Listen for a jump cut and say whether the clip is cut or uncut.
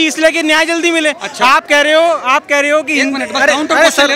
uncut